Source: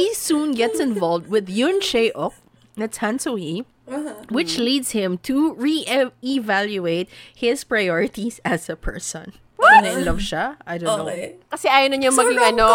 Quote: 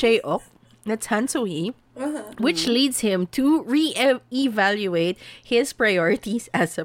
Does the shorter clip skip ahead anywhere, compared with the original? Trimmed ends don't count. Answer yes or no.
no